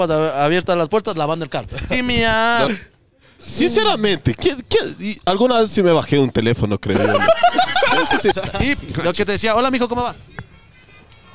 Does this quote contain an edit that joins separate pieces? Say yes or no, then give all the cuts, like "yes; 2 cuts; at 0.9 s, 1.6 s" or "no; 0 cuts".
yes; 2 cuts; at 2.7 s, 8.3 s